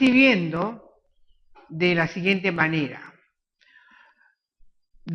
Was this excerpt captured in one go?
yes; 0 cuts

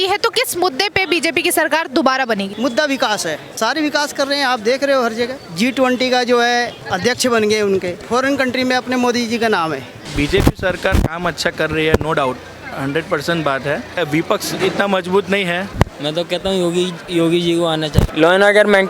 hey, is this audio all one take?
no; 9 cuts; at 2.5 s, 3.5 s, 5.4 s, 6.8 s, 8.0 s, 10.1 s, 14.0 s, 15.7 s, 18.0 s

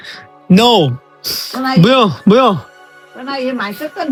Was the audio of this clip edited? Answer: no; 0 cuts

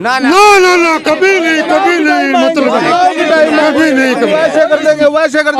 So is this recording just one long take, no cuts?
yes; 0 cuts

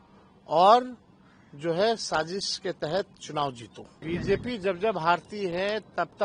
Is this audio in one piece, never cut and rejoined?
no; 1 cut; at 3.9 s

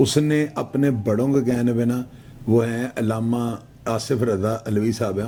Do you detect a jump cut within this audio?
no; 0 cuts

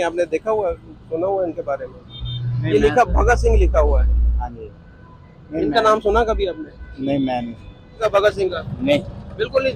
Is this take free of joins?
no; 1 cut; at 8.0 s

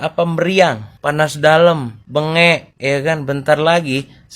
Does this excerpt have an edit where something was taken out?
yes; 2 cuts; at 0.9 s, 1.9 s

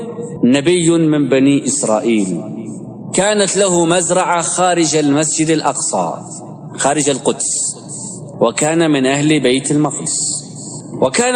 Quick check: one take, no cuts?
yes; 0 cuts

